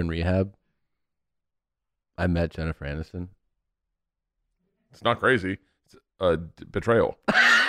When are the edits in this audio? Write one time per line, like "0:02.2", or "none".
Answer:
none